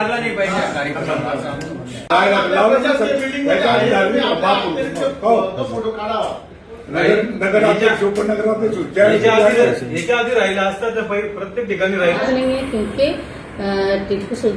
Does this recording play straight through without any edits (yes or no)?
no